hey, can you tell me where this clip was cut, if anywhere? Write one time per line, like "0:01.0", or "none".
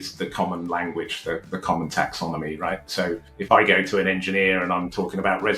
0:03.3